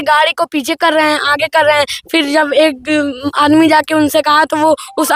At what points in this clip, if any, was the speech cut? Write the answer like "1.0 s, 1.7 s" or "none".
none